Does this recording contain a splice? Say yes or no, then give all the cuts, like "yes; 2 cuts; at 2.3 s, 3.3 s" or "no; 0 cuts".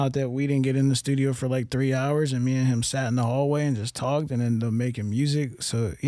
no; 0 cuts